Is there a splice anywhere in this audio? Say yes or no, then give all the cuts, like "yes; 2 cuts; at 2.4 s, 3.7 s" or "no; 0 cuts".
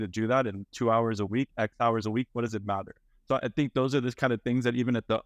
yes; 1 cut; at 3.0 s